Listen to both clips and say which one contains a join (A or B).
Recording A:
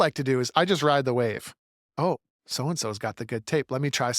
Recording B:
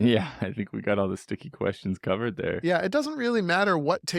A